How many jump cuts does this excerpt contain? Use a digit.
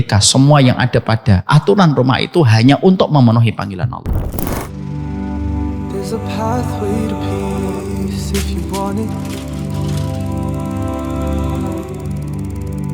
1